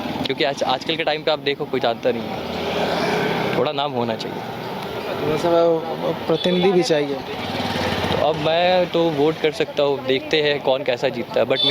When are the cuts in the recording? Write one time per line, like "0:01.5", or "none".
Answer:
none